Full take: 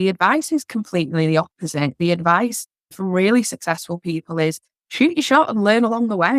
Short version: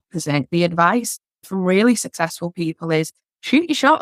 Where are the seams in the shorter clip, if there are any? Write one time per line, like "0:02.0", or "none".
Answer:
none